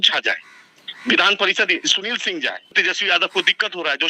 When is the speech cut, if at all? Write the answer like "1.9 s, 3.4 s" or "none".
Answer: 2.7 s

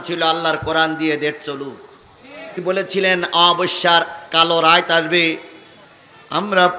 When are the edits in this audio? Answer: 2.6 s

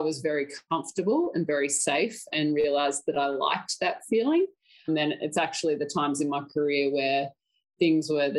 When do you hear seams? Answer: none

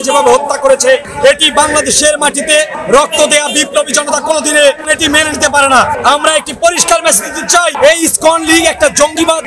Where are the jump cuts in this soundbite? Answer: none

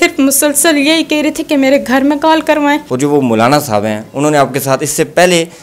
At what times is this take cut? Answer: 2.9 s

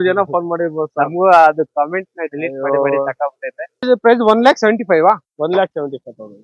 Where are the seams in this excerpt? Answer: 3.9 s

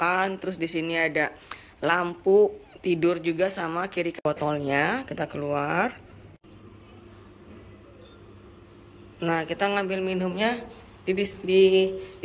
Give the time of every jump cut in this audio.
4.2 s

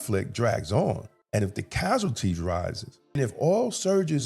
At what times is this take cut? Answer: 1.1 s, 3.2 s

